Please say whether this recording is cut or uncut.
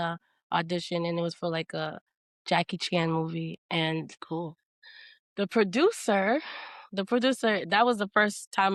uncut